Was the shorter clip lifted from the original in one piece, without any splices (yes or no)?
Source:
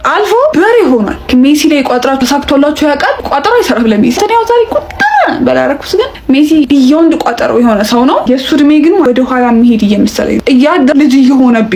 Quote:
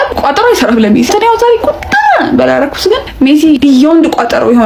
yes